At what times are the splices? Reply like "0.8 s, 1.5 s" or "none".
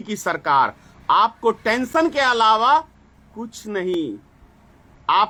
none